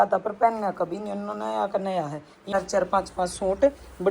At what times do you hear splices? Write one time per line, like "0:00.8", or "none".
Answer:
0:02.5